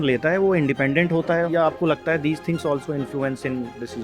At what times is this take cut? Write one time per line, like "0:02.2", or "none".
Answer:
0:01.5